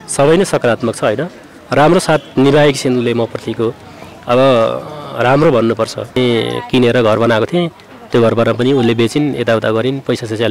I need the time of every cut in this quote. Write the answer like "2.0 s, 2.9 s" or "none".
6.2 s